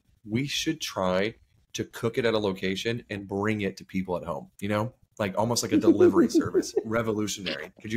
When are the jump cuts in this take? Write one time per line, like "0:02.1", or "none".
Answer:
0:04.5